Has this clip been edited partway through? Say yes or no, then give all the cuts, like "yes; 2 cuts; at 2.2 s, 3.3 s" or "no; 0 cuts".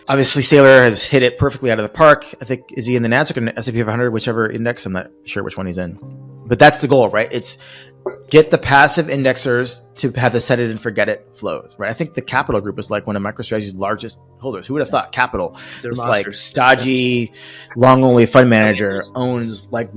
no; 0 cuts